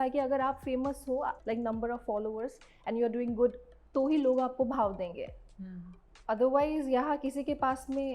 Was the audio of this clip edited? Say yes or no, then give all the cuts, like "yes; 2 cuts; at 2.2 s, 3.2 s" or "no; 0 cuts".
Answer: yes; 2 cuts; at 1.4 s, 3.7 s